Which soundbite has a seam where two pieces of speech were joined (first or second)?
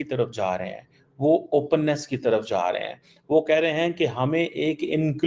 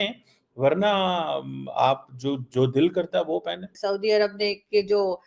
second